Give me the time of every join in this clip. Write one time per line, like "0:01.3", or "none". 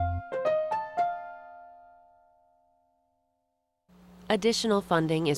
0:03.9